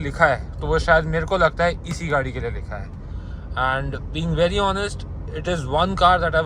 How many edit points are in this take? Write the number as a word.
zero